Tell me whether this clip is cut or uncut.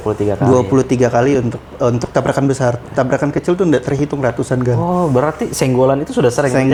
uncut